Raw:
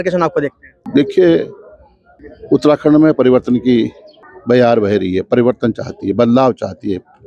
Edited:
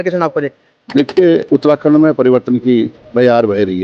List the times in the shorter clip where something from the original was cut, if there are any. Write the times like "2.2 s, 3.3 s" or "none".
1.4 s, 3.0 s